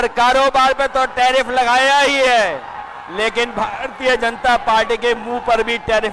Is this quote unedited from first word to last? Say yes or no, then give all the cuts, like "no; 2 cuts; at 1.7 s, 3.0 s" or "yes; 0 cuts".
yes; 0 cuts